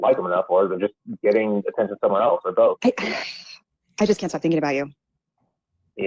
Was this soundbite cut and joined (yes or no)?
yes